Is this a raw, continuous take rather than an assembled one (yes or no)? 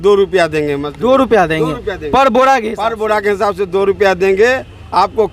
yes